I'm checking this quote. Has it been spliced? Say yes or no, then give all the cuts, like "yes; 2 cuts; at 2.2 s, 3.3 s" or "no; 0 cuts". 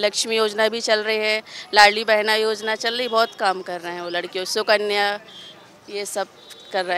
no; 0 cuts